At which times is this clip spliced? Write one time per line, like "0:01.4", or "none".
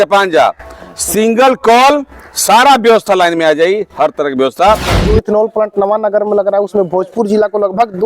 0:05.1